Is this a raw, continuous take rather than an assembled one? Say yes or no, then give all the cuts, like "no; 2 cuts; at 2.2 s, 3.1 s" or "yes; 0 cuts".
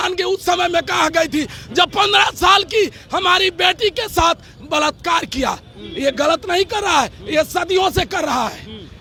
yes; 0 cuts